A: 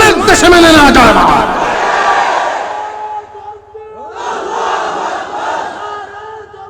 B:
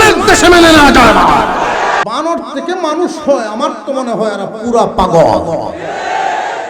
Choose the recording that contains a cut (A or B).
B